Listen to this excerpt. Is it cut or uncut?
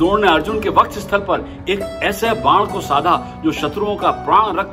uncut